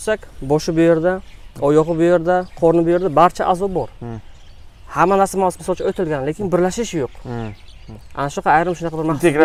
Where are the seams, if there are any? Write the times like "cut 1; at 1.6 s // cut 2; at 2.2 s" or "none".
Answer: none

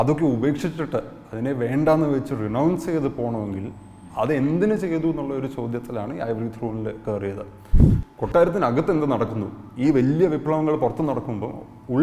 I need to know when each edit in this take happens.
cut 1; at 7.8 s

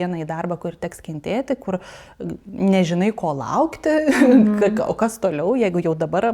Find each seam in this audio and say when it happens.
none

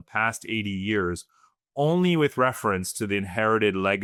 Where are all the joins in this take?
none

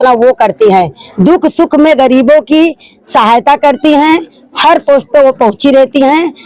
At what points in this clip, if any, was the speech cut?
none

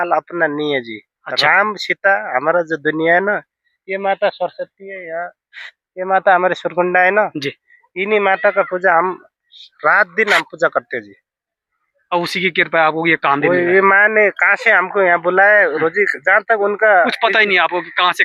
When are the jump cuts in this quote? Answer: none

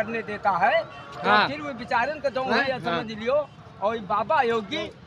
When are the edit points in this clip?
none

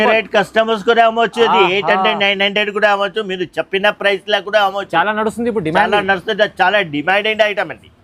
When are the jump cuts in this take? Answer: none

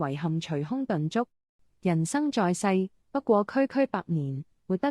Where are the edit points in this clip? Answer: cut 1; at 1.7 s

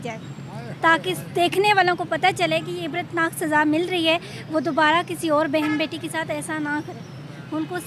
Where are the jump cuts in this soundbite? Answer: none

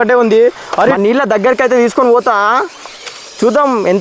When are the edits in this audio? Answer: cut 1; at 0.9 s

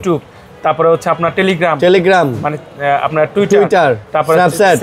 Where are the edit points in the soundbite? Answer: none

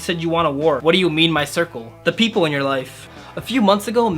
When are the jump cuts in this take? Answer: cut 1; at 0.8 s // cut 2; at 3.1 s

